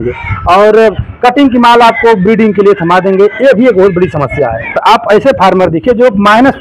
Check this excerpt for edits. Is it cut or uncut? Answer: cut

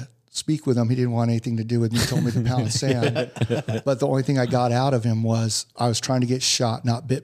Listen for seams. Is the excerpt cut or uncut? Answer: uncut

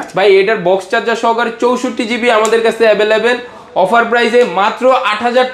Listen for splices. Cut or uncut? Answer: uncut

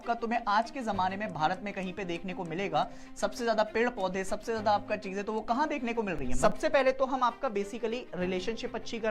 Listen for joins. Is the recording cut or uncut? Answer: cut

